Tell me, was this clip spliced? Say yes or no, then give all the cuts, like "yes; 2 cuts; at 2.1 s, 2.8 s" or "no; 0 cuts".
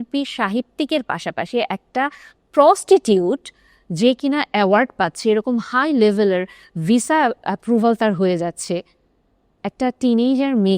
no; 0 cuts